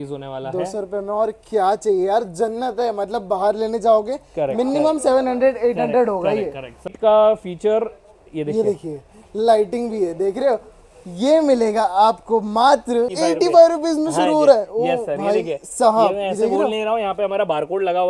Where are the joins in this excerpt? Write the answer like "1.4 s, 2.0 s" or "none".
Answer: 6.9 s, 13.1 s